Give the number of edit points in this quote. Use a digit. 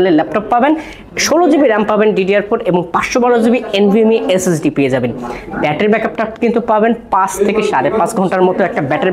0